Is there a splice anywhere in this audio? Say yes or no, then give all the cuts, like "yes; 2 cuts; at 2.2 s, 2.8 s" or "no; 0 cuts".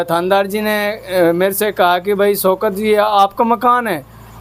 no; 0 cuts